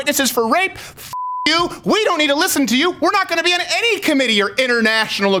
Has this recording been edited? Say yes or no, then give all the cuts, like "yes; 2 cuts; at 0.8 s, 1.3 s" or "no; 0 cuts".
no; 0 cuts